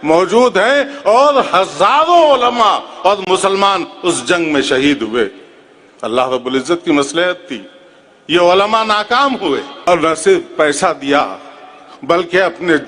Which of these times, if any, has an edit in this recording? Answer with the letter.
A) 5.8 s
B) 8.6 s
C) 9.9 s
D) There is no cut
C